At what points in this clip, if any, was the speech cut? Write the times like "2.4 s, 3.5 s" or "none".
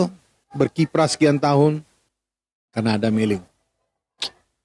none